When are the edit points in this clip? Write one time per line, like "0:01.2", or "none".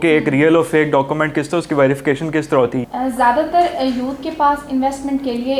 0:02.8